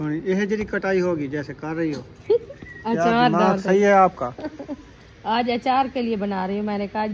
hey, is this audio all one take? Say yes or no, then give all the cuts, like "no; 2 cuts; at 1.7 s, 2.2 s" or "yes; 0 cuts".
yes; 0 cuts